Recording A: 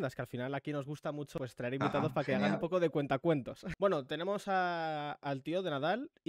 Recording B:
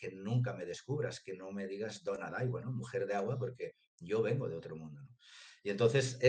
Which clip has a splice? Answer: A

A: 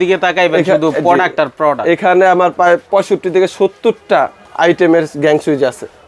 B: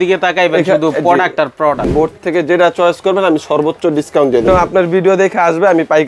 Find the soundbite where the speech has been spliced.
B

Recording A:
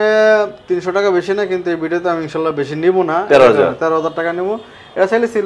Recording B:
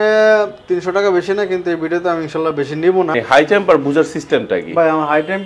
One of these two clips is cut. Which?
B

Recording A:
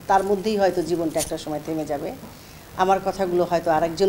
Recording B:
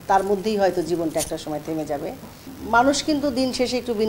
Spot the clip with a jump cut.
B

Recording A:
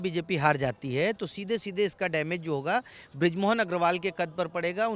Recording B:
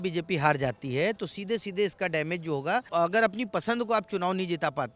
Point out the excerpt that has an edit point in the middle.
B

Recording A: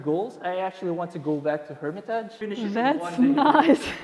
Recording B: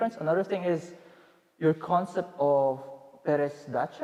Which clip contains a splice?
A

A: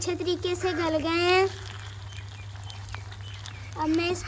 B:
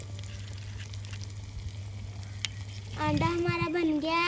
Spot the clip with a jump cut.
B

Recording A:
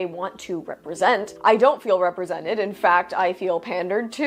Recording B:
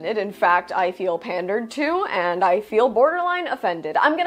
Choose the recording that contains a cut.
A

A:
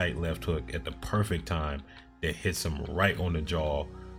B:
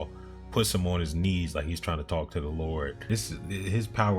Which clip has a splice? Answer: B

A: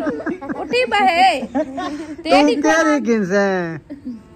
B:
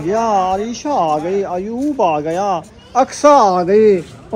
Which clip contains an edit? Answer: B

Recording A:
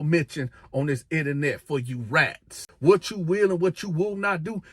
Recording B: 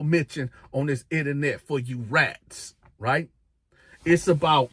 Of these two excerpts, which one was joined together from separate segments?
A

